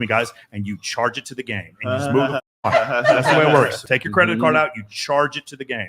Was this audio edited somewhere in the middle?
yes; 1 cut; at 3.8 s

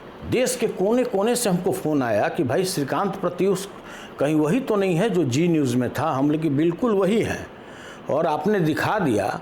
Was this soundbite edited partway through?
no; 0 cuts

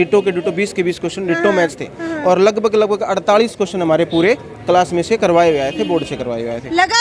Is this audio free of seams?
yes; 0 cuts

